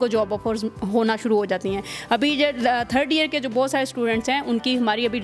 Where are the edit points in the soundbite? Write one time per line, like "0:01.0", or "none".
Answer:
none